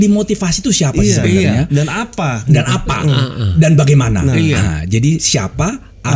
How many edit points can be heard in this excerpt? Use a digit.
0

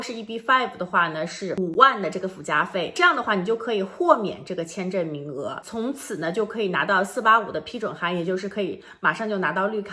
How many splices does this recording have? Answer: 2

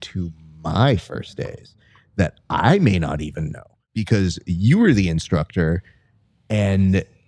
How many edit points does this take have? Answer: 1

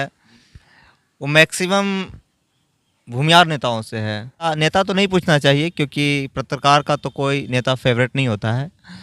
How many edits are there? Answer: 1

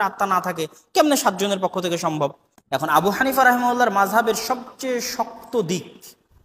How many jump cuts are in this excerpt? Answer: 1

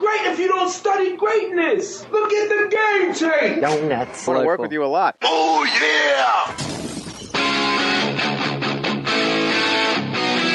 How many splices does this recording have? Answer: 1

